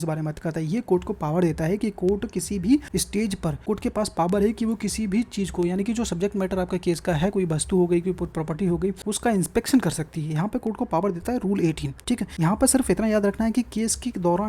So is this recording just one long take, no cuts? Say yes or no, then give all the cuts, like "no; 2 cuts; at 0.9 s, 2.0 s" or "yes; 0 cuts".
no; 3 cuts; at 3.2 s, 9.0 s, 12.2 s